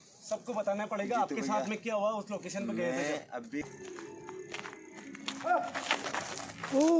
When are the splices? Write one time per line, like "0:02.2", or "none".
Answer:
0:03.6